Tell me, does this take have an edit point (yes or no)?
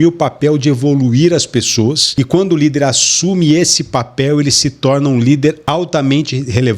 yes